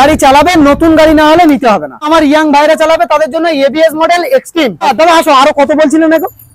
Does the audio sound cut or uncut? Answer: cut